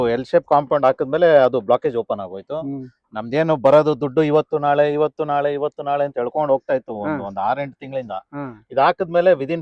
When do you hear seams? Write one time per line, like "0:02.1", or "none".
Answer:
none